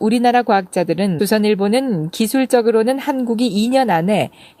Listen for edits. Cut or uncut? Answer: uncut